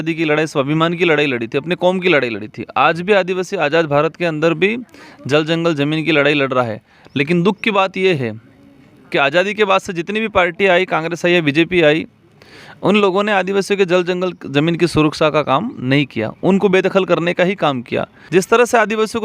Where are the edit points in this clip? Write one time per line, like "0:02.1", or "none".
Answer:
0:18.2